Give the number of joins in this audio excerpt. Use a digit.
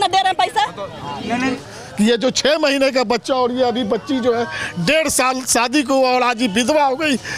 1